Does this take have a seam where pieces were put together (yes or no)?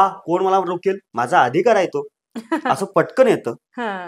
yes